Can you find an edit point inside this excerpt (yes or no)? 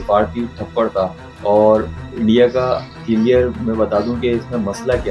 no